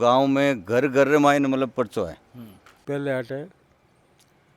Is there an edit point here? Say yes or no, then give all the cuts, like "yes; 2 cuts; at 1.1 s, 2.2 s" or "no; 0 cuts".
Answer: yes; 1 cut; at 2.7 s